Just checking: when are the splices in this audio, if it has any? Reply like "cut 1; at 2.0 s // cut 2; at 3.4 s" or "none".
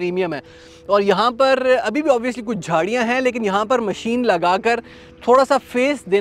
none